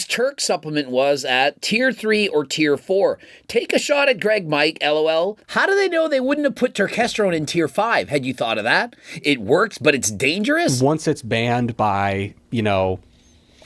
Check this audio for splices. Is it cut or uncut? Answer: cut